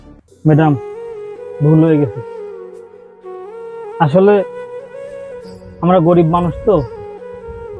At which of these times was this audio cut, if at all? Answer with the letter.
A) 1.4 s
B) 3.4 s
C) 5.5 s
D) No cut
D